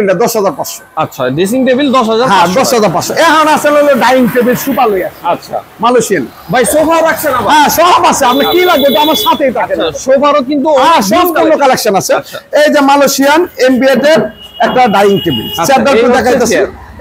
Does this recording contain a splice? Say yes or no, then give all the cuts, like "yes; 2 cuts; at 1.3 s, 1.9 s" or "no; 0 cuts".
no; 0 cuts